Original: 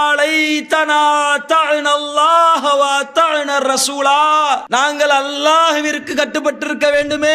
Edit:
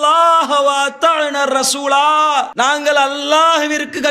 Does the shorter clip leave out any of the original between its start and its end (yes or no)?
no